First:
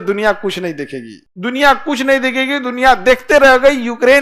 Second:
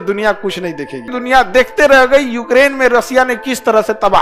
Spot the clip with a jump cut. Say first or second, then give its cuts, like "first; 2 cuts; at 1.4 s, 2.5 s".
second; 1 cut; at 1.1 s